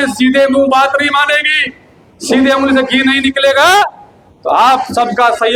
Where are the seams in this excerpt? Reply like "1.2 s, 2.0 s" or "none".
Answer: none

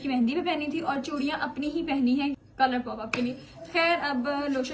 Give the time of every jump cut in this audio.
none

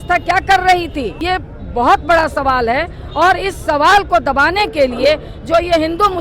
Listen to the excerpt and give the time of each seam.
1.2 s

